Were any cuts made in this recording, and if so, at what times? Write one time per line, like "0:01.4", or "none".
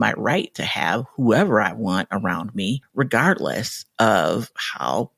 0:02.9